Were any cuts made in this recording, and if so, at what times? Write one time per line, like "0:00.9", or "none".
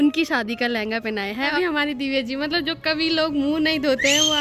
0:01.5